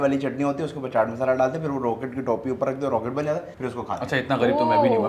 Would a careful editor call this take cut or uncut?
cut